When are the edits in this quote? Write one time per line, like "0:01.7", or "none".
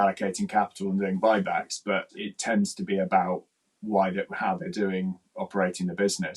0:02.2